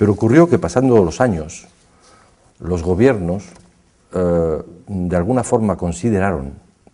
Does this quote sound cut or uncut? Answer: uncut